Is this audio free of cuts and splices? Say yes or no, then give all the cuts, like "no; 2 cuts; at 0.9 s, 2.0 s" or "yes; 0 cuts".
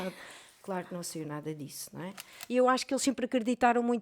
no; 1 cut; at 2.3 s